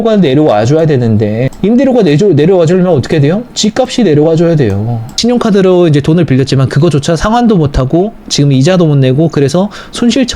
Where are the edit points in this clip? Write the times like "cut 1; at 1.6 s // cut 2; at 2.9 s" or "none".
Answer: cut 1; at 1.5 s // cut 2; at 5.1 s